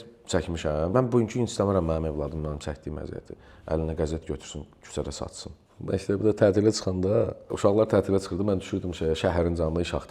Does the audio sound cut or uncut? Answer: cut